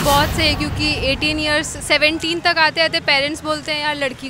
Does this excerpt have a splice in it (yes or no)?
no